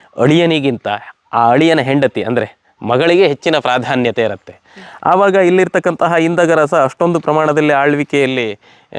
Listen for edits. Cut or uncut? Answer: uncut